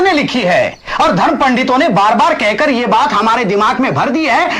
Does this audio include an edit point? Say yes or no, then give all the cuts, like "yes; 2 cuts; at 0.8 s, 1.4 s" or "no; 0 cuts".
no; 0 cuts